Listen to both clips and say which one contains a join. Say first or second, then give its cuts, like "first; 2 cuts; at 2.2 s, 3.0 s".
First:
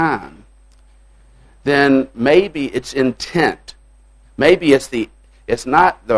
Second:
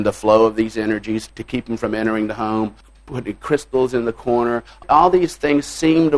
second; 3 cuts; at 1.3 s, 2.8 s, 4.8 s